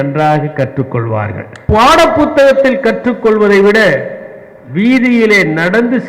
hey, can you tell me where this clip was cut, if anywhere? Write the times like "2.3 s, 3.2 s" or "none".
1.5 s